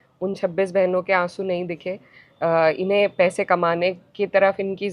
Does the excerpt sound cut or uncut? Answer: uncut